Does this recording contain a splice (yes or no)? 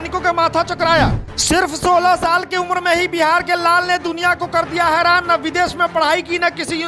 yes